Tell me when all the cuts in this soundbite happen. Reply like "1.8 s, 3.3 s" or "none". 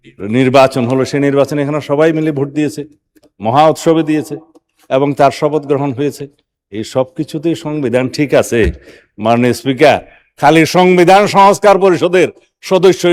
none